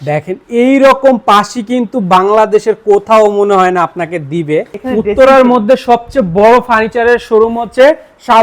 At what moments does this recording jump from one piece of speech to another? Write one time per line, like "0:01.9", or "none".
0:04.8